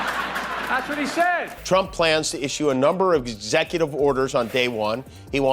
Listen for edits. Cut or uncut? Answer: cut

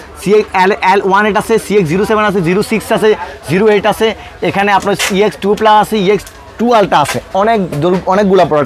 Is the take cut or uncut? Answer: uncut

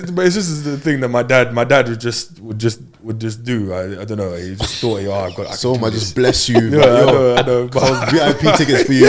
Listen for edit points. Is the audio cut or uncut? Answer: uncut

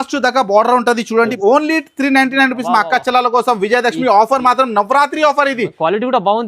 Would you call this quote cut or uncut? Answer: cut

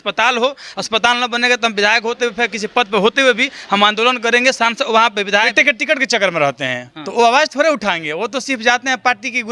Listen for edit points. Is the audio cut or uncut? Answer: cut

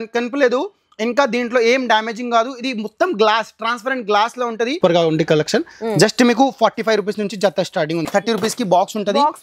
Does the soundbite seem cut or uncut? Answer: cut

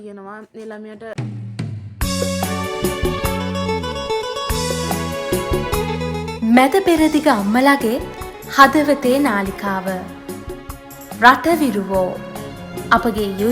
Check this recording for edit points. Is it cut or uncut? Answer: cut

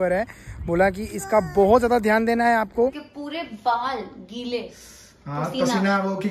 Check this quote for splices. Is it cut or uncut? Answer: cut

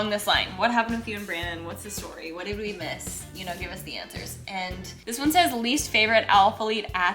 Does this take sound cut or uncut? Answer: cut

